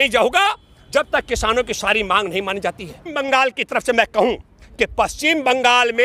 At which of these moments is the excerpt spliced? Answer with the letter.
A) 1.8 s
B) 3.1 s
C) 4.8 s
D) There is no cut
B